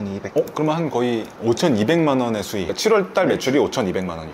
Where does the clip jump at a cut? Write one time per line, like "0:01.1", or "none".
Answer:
none